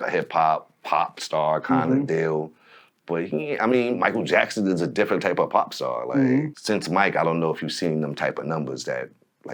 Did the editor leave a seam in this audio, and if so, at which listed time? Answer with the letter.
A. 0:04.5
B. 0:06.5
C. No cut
B